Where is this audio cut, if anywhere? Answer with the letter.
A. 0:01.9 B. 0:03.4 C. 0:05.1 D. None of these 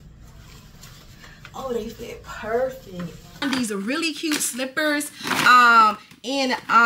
B